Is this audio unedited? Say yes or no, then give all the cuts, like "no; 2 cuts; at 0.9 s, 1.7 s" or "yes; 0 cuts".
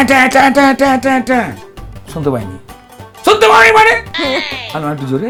yes; 0 cuts